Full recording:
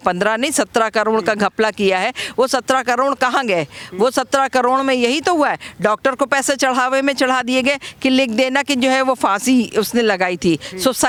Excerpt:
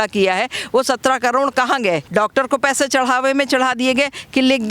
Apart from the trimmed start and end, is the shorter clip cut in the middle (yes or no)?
yes